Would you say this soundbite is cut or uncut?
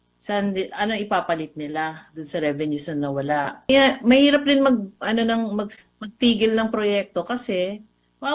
cut